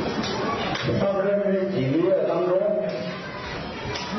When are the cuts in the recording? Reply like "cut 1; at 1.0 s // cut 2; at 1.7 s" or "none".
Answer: cut 1; at 1.0 s